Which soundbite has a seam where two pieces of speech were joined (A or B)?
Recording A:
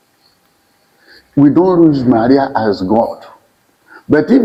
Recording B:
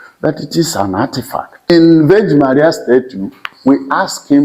B